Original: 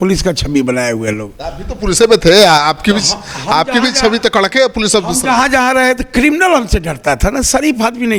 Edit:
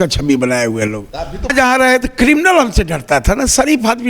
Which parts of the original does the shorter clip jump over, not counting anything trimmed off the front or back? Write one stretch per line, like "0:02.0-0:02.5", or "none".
0:01.8-0:05.5